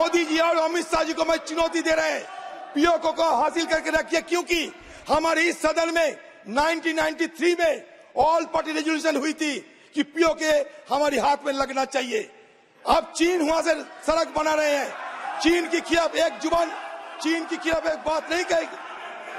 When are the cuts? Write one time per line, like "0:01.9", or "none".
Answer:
none